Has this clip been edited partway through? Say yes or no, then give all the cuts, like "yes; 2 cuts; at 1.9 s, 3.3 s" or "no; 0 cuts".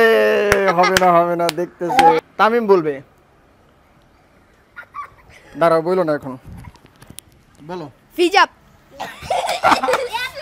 yes; 1 cut; at 2.2 s